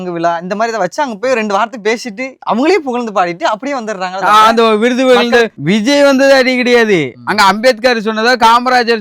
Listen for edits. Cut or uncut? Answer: cut